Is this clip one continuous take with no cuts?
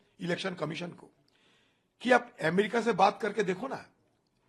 yes; 0 cuts

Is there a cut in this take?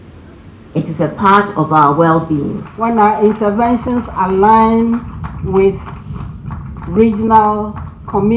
yes; 1 cut; at 2.6 s

